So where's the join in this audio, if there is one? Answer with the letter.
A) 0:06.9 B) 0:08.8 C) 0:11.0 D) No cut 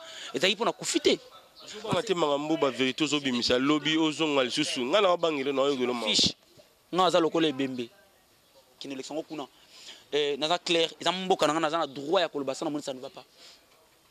B